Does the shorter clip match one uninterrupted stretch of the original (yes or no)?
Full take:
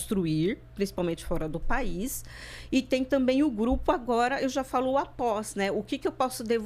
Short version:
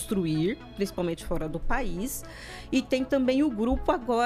yes